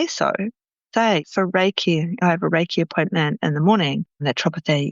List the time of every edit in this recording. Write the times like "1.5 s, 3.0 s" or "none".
1.2 s